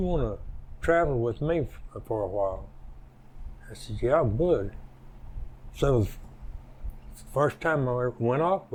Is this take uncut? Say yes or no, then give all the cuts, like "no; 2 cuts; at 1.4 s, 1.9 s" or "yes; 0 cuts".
yes; 0 cuts